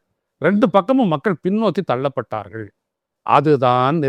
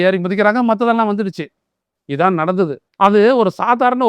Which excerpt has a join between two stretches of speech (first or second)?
second